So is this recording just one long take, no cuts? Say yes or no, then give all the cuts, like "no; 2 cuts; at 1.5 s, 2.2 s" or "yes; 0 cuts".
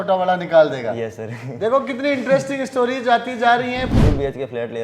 no; 1 cut; at 3.9 s